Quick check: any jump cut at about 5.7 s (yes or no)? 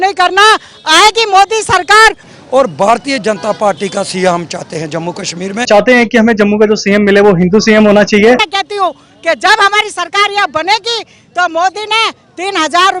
yes